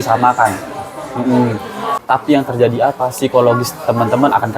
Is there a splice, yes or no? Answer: yes